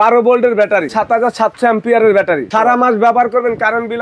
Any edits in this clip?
yes; 2 cuts; at 0.9 s, 2.5 s

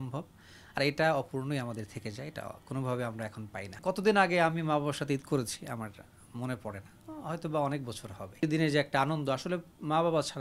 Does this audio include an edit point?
yes; 2 cuts; at 3.7 s, 8.4 s

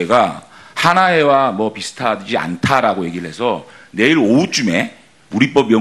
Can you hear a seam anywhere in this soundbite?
no; 0 cuts

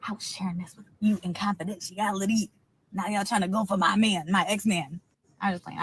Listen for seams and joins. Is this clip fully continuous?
yes; 0 cuts

